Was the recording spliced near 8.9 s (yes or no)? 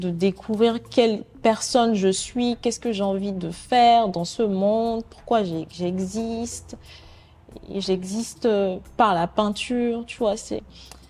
no